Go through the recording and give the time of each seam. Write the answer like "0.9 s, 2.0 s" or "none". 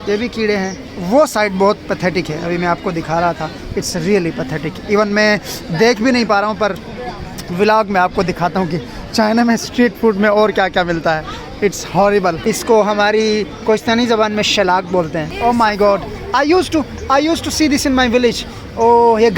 0.9 s, 12.4 s, 15.3 s